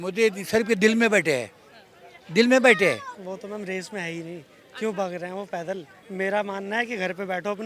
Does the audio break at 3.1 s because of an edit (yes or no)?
yes